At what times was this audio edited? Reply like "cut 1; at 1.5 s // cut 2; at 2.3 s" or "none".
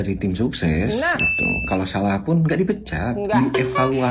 none